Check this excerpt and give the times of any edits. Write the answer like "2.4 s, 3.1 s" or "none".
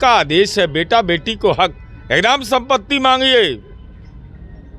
none